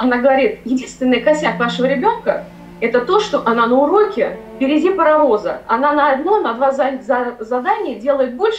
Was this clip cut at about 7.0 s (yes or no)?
no